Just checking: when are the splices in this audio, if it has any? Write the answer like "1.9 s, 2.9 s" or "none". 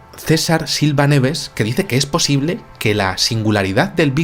none